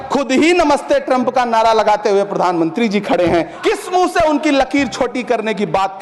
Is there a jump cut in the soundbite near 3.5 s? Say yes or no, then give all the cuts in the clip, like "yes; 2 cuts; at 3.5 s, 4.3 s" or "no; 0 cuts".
yes; 1 cut; at 3.5 s